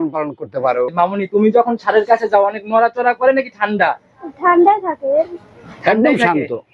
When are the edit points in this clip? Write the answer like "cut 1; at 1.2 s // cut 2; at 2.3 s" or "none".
cut 1; at 0.9 s